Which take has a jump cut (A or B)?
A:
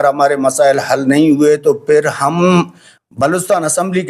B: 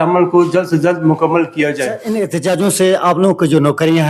B